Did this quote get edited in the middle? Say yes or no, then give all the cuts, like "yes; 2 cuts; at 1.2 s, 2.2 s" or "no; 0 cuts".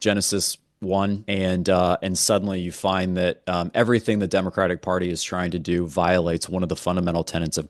yes; 1 cut; at 1.2 s